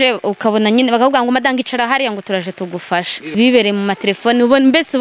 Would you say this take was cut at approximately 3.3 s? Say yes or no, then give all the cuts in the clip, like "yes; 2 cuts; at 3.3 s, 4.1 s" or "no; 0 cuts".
yes; 1 cut; at 3.3 s